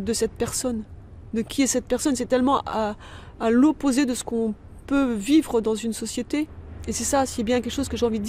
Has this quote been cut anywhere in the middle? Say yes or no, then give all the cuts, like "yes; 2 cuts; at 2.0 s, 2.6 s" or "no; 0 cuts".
yes; 1 cut; at 6.7 s